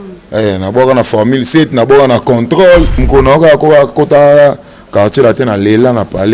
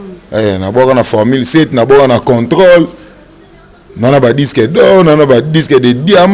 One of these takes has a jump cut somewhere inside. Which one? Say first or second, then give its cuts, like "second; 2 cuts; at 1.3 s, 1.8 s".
first; 1 cut; at 3.0 s